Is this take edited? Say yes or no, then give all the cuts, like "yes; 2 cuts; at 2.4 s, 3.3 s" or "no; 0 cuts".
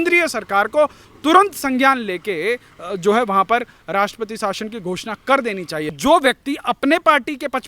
yes; 1 cut; at 5.9 s